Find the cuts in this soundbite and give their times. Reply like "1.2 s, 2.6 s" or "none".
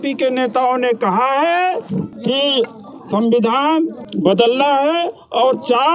2.1 s, 4.0 s